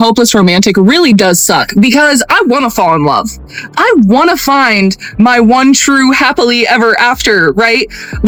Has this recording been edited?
no; 0 cuts

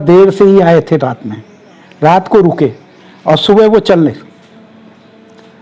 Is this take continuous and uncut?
yes; 0 cuts

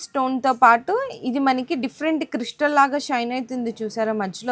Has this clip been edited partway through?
no; 0 cuts

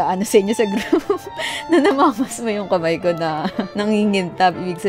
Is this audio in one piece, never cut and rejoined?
no; 1 cut; at 3.6 s

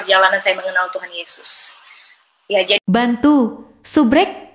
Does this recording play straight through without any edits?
no; 1 cut; at 2.8 s

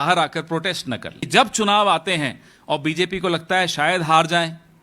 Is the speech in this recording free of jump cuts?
no; 1 cut; at 1.2 s

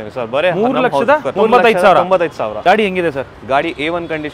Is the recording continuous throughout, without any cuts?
no; 2 cuts; at 1.3 s, 2.5 s

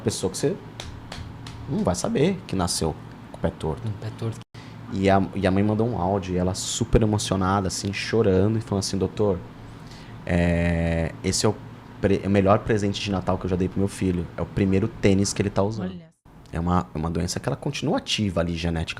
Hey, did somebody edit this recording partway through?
yes; 2 cuts; at 4.3 s, 15.8 s

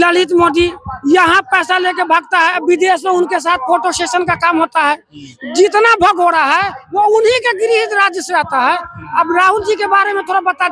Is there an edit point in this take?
no; 0 cuts

